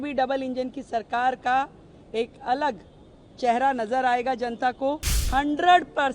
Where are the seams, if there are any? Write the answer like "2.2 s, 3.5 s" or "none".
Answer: 5.2 s

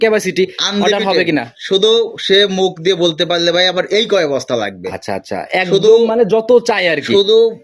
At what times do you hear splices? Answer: none

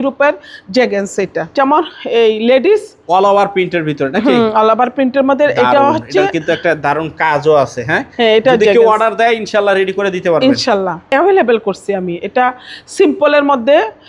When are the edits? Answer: 1.5 s, 11.1 s

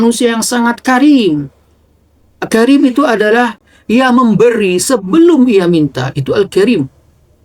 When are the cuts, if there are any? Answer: 3.6 s

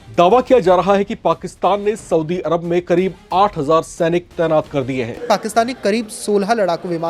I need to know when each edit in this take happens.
5.2 s

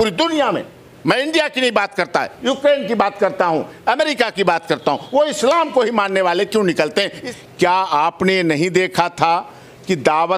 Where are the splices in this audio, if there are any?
7.2 s

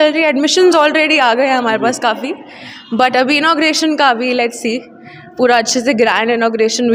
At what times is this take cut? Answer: none

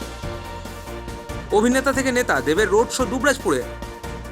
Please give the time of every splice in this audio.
0.9 s

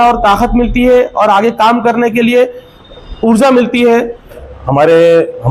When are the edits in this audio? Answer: 4.4 s

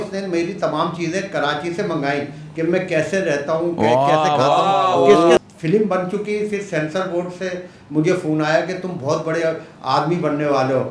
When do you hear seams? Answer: 5.4 s

